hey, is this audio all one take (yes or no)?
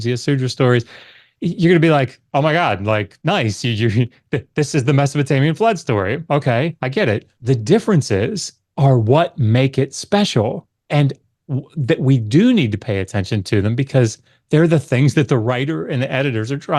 yes